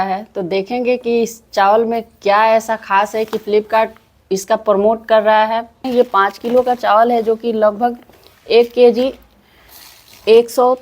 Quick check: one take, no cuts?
no; 1 cut; at 5.9 s

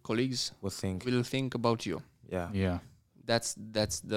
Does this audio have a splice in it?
no; 0 cuts

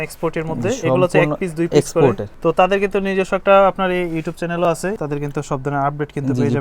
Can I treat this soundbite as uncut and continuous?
no; 2 cuts; at 2.3 s, 5.0 s

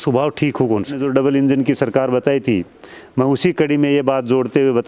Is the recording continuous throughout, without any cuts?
no; 1 cut; at 1.0 s

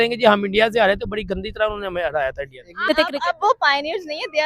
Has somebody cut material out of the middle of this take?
yes; 1 cut; at 2.8 s

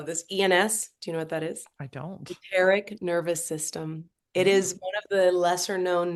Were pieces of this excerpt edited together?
no; 0 cuts

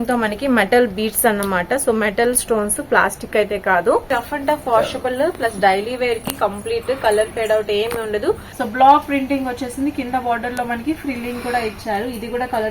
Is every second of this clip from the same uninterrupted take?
no; 2 cuts; at 4.1 s, 8.5 s

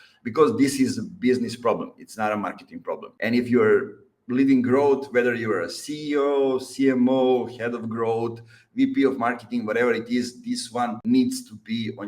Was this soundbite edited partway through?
yes; 2 cuts; at 3.1 s, 11.0 s

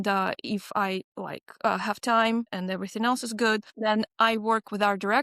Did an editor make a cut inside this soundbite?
yes; 3 cuts; at 1.2 s, 2.5 s, 3.7 s

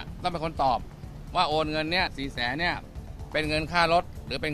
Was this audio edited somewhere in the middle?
no; 0 cuts

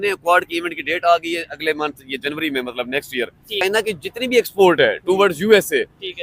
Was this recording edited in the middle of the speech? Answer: yes; 1 cut; at 3.6 s

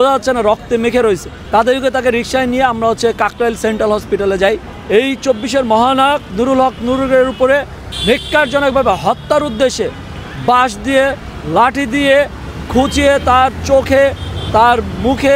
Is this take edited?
yes; 2 cuts; at 1.3 s, 4.7 s

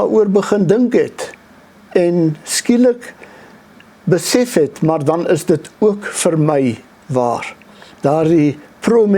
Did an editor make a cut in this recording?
no; 0 cuts

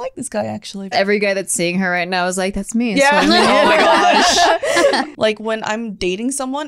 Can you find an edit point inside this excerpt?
yes; 2 cuts; at 0.9 s, 5.1 s

